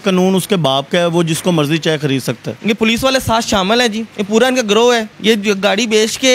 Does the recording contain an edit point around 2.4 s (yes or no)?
yes